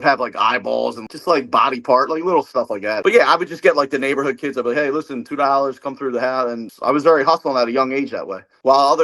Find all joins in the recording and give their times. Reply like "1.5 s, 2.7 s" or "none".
1.1 s, 6.7 s